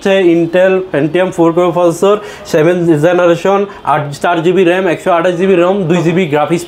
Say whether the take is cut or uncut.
uncut